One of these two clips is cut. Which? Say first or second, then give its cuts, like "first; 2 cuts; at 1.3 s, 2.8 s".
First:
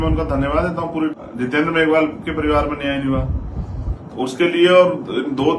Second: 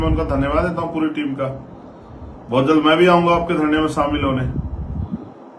first; 1 cut; at 1.2 s